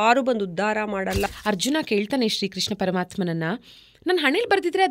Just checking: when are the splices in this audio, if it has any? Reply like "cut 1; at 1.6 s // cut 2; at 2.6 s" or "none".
cut 1; at 1.3 s